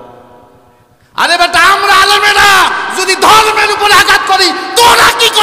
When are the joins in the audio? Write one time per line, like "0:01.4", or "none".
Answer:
none